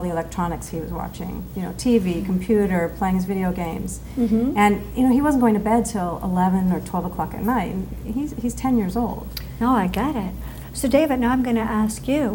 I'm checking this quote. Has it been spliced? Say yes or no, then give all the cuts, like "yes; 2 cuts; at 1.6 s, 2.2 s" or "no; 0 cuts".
no; 0 cuts